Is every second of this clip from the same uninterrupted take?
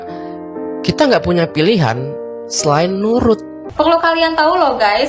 no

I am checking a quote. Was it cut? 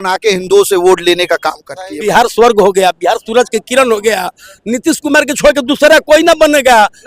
yes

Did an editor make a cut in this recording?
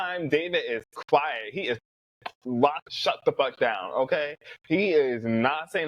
no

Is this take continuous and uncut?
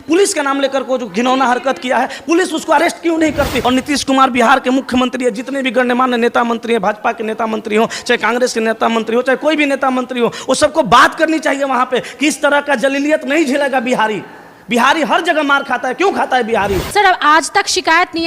no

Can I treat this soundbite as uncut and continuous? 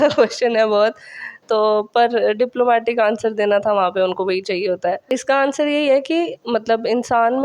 no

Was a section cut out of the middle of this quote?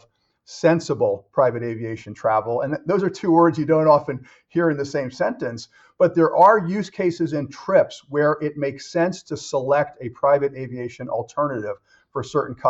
no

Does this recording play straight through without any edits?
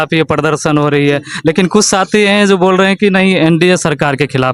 yes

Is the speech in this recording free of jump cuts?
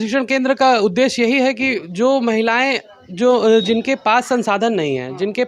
yes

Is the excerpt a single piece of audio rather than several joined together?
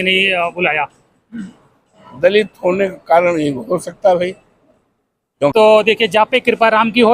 no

